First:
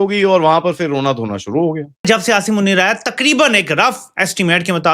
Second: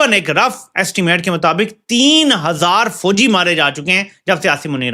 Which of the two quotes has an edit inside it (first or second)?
first